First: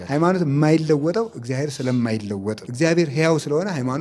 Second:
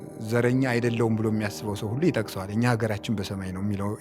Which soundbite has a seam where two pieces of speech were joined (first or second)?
first